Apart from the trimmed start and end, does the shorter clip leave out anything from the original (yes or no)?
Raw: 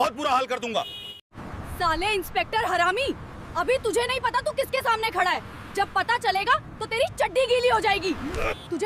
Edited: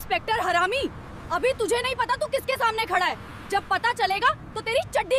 no